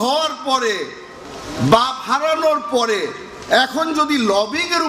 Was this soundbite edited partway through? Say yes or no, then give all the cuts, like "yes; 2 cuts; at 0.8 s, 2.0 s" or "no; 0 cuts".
no; 0 cuts